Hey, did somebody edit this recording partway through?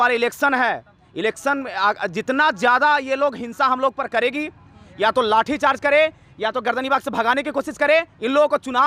no; 0 cuts

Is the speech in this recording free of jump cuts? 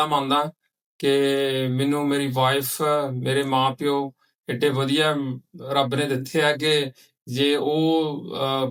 yes; 0 cuts

